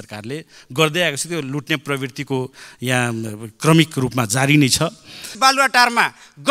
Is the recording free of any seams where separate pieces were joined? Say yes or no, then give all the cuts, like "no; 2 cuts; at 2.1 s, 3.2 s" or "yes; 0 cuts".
no; 1 cut; at 5.3 s